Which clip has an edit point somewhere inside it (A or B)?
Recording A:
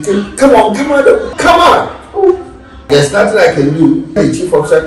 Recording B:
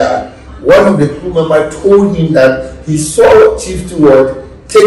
A